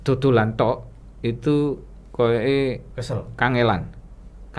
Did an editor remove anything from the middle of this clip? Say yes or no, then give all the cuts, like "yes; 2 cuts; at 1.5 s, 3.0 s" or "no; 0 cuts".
no; 0 cuts